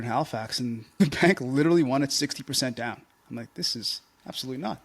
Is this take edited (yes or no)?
yes